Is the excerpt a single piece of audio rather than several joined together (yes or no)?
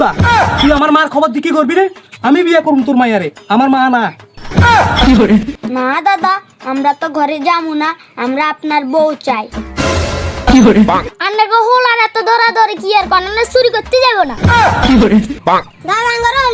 no